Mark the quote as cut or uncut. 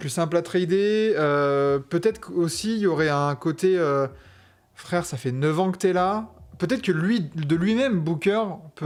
uncut